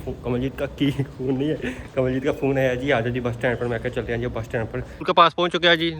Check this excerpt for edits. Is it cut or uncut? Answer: cut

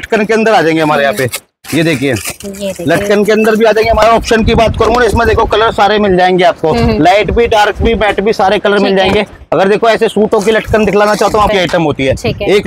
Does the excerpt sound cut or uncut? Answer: cut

